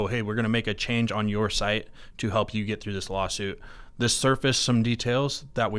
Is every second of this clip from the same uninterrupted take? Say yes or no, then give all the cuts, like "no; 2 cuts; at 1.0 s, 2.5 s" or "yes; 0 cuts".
yes; 0 cuts